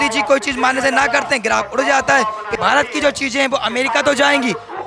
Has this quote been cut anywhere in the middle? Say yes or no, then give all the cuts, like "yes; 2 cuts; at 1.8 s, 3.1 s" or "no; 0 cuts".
yes; 1 cut; at 2.5 s